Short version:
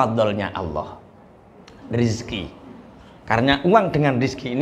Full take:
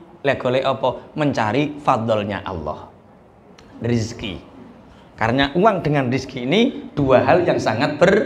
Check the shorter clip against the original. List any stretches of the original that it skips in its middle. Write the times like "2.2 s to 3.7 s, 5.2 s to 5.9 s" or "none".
none